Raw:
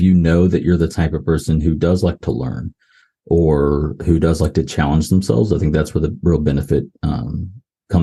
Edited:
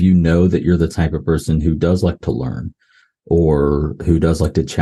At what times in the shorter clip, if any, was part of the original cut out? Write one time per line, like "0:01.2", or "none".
none